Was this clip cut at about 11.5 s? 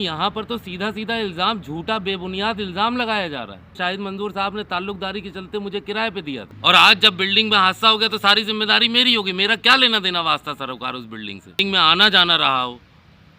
yes; 3 cuts; at 3.8 s, 6.5 s, 11.5 s

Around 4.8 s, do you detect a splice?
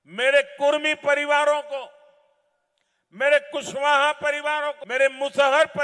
yes; 1 cut; at 4.8 s

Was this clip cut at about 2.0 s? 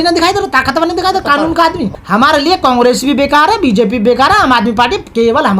yes; 1 cut; at 2.0 s

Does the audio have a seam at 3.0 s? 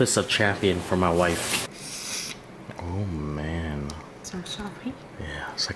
no; 1 cut; at 1.5 s

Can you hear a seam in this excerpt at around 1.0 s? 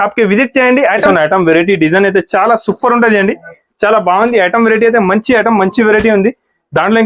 yes; 1 cut; at 1.0 s

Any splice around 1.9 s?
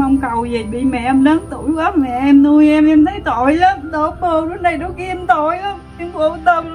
no; 0 cuts

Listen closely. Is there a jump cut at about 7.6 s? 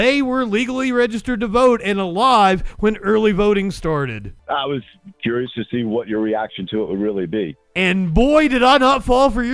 no; 1 cut; at 4.3 s

